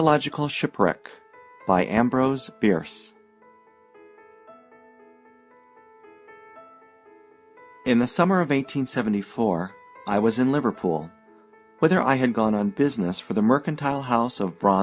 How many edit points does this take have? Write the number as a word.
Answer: one